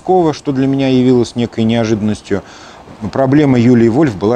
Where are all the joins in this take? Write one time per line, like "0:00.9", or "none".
none